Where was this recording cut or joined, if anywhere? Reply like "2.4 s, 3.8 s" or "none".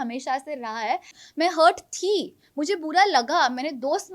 1.2 s

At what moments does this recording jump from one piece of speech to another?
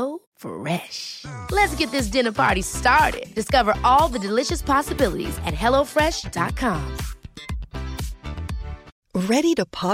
8.9 s

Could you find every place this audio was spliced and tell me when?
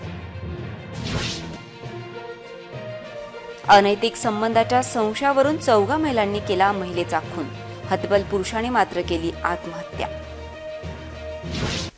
1.0 s

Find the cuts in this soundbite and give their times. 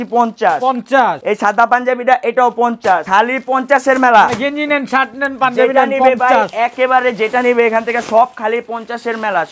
1.2 s, 3.0 s

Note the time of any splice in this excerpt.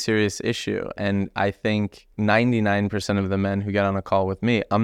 2.1 s

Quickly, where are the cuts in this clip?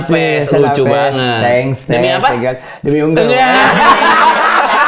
none

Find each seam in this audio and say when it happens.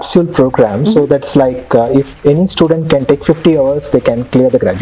none

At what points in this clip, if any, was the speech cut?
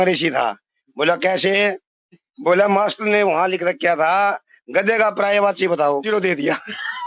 6.1 s

